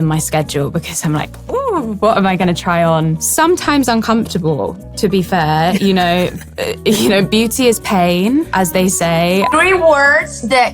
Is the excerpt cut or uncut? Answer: cut